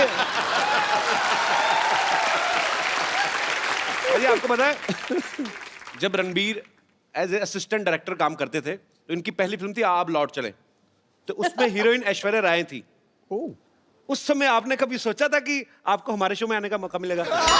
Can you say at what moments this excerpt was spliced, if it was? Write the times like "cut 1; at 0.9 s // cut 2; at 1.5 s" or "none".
cut 1; at 4.0 s

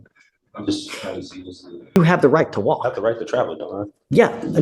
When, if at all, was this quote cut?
cut 1; at 2.0 s

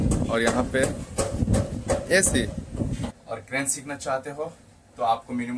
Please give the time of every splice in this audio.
cut 1; at 3.1 s

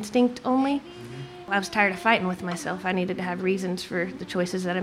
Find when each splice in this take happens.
cut 1; at 1.5 s

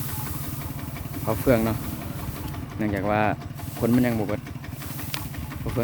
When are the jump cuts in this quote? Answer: none

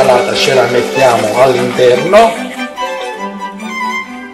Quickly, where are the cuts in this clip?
none

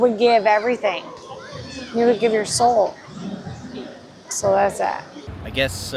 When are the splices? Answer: none

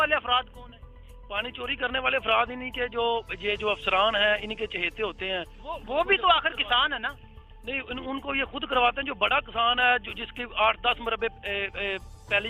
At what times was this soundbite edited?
none

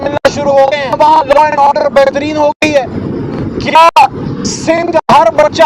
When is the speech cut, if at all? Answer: cut 1; at 1.0 s

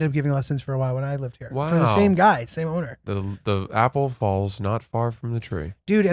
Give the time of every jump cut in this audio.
none

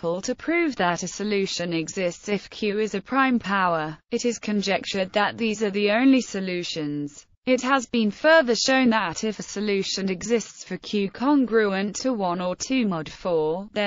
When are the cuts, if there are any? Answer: cut 1; at 5.2 s

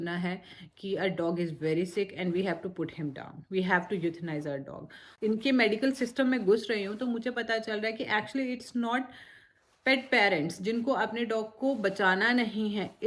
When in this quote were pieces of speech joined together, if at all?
cut 1; at 5.1 s

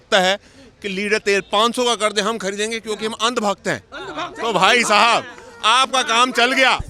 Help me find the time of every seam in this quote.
none

